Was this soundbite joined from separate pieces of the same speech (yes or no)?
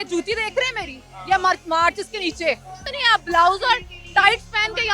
yes